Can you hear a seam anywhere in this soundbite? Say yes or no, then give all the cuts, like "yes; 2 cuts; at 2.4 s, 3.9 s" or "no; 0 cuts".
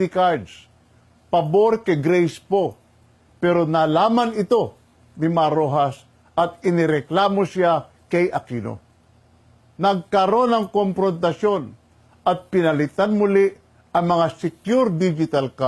yes; 1 cut; at 10.5 s